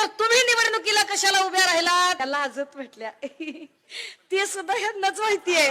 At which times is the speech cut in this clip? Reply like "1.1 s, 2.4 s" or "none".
2.2 s